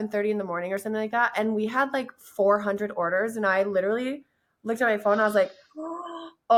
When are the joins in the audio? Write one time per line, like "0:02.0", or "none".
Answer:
none